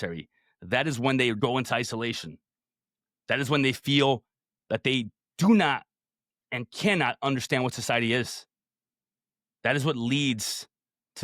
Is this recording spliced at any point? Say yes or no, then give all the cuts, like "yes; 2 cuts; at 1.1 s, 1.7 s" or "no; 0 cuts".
yes; 1 cut; at 1.4 s